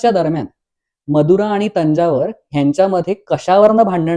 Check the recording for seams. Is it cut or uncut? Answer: uncut